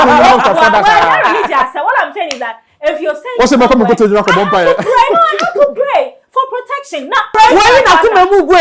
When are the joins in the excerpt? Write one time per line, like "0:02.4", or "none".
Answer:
0:07.3